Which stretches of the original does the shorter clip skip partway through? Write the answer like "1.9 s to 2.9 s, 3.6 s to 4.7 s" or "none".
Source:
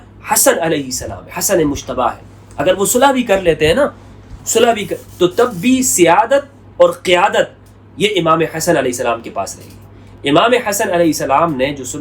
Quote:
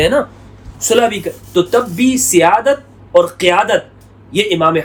none